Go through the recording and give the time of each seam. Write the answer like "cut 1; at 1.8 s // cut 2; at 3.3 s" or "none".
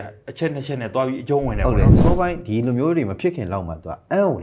cut 1; at 1.9 s

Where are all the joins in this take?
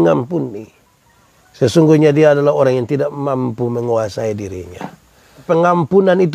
cut 1; at 5.4 s

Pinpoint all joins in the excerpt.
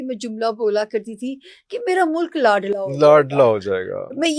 none

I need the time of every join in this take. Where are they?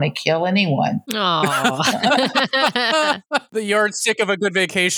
cut 1; at 1.1 s // cut 2; at 3.5 s

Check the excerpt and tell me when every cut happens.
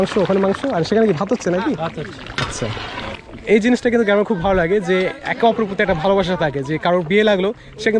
cut 1; at 3.2 s

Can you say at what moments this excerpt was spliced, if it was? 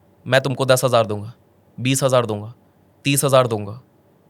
none

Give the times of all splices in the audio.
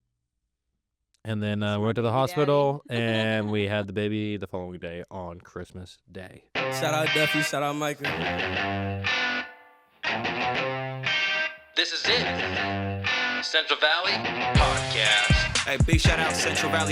cut 1; at 6.4 s

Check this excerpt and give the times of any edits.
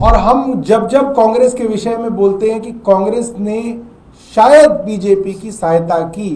none

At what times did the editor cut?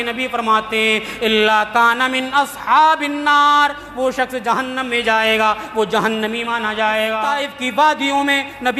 cut 1; at 7.2 s

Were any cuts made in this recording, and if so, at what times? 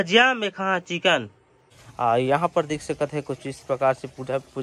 cut 1; at 1.5 s

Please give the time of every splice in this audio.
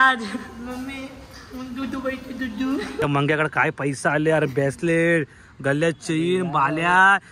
cut 1; at 3.0 s

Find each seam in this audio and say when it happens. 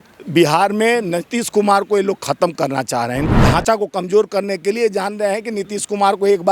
cut 1; at 3.3 s

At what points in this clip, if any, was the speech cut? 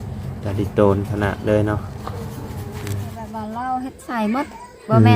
cut 1; at 3.4 s

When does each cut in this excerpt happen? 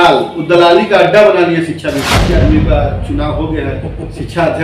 cut 1; at 2.3 s

